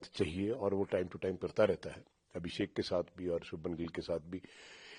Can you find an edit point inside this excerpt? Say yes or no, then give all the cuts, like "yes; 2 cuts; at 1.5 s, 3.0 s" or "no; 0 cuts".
no; 0 cuts